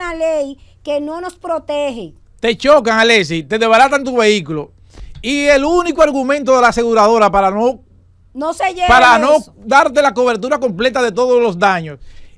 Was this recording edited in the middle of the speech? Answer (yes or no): no